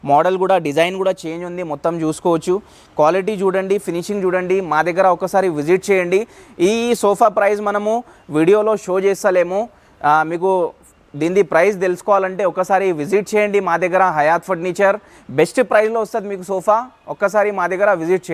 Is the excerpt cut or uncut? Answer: uncut